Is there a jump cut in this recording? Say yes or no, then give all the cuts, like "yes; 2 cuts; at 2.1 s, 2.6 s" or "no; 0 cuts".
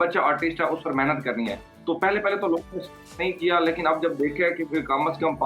no; 0 cuts